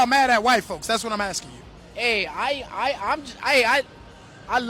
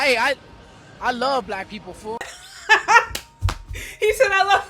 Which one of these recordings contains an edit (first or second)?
second